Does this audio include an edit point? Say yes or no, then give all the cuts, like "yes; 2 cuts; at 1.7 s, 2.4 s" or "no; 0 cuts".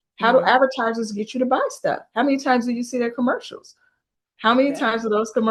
no; 0 cuts